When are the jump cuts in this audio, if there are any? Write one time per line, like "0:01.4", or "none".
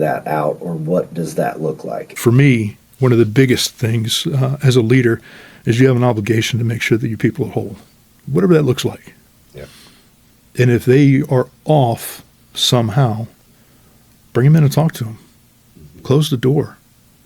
0:02.1